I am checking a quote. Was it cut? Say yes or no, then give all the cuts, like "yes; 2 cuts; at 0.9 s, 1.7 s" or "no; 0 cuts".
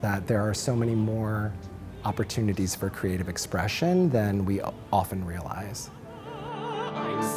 yes; 1 cut; at 6.3 s